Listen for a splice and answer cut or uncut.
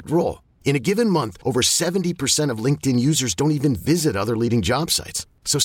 uncut